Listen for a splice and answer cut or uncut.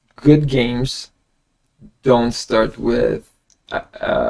uncut